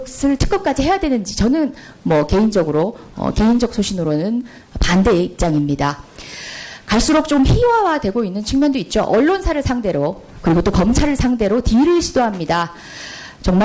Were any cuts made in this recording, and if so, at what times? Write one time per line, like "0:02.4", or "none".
none